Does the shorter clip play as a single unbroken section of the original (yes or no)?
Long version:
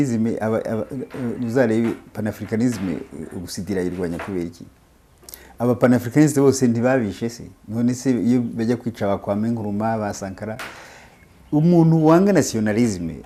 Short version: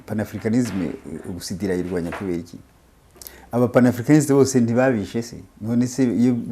yes